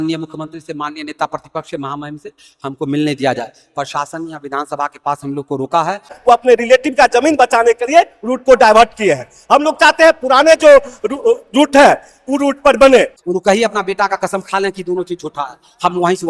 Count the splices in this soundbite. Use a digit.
2